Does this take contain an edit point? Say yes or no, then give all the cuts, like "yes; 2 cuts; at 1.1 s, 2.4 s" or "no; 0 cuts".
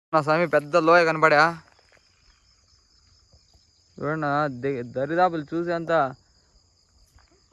no; 0 cuts